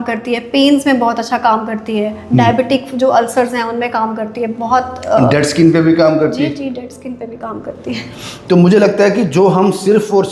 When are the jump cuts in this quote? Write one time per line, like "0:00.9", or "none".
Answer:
none